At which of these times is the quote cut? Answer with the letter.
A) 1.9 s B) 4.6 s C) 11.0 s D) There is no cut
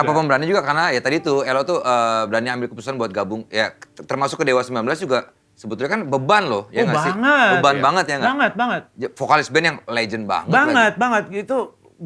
D